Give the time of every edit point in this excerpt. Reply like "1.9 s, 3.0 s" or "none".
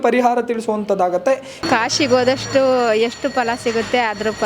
1.6 s